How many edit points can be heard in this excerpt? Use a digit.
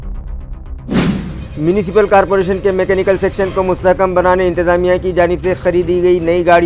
1